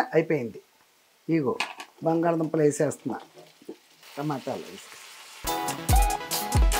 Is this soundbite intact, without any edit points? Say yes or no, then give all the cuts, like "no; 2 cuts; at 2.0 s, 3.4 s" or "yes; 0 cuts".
no; 1 cut; at 4.0 s